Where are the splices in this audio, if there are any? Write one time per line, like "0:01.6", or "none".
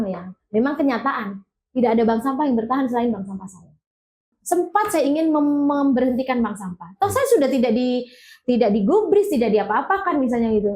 0:04.3